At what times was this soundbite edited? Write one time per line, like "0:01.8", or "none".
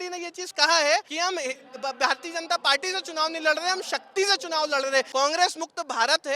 0:01.1
0:05.1

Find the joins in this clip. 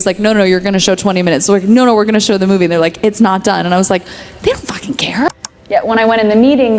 0:05.5

